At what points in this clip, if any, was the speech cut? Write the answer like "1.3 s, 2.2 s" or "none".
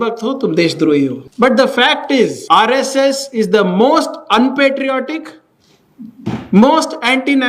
1.2 s, 2.4 s